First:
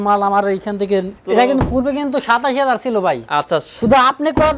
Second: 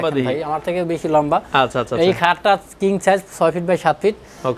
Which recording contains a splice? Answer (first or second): first